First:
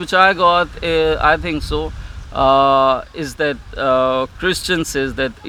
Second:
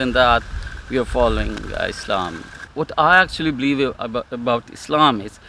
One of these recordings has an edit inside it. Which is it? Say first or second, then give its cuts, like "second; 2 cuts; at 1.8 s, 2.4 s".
second; 1 cut; at 2.6 s